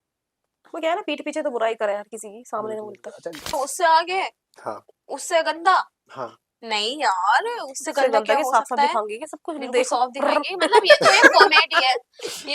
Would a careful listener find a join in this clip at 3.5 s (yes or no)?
yes